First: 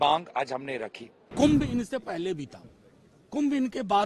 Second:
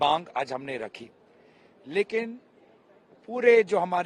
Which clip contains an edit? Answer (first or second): first